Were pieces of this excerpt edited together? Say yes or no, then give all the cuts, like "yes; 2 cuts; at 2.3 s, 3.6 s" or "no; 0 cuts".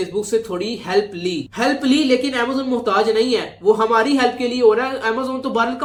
no; 0 cuts